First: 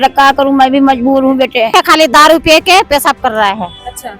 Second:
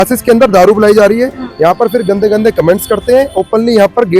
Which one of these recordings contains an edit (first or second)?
first